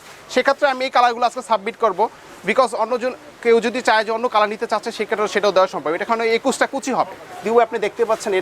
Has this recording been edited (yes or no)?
no